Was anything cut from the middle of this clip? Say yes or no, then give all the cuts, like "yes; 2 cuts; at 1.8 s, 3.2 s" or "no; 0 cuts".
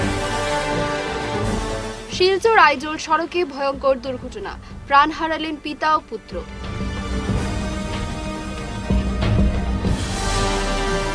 no; 0 cuts